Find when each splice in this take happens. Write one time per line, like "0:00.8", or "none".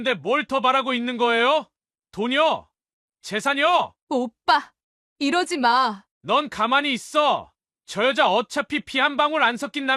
0:06.1